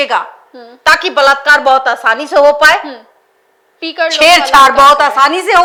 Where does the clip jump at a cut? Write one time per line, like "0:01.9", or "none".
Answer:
none